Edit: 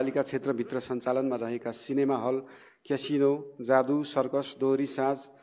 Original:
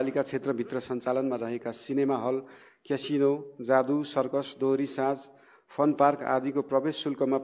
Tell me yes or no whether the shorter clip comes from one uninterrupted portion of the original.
yes